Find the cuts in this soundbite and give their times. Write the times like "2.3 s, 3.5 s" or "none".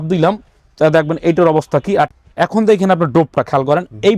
2.1 s

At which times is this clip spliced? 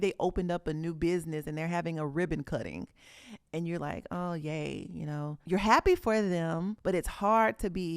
5.4 s, 6.7 s

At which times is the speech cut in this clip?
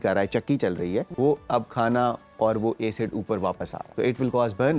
1.1 s, 3.8 s

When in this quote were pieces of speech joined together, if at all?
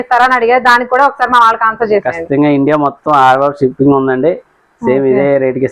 none

